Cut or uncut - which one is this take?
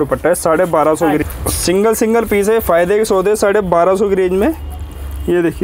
cut